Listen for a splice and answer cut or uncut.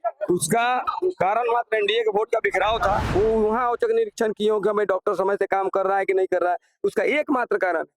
cut